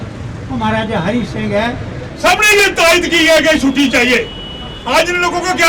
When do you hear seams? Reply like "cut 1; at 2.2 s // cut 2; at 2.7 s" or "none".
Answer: cut 1; at 2.0 s